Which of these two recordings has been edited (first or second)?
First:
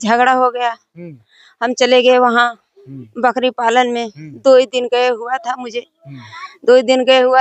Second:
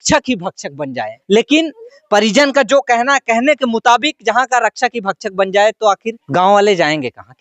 second